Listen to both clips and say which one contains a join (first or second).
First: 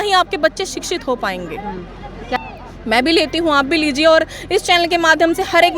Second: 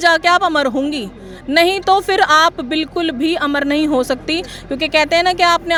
first